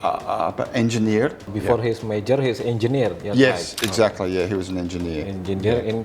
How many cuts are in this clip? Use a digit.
1